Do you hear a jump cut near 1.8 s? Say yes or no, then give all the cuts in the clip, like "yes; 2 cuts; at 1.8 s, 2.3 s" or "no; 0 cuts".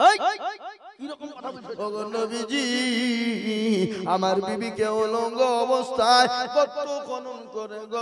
yes; 1 cut; at 1.8 s